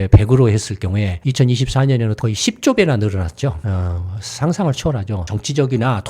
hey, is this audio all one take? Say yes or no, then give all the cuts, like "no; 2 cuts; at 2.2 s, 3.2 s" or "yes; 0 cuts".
no; 3 cuts; at 1.1 s, 2.2 s, 5.2 s